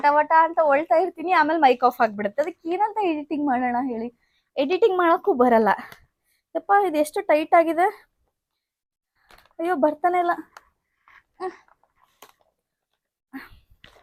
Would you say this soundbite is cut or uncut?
uncut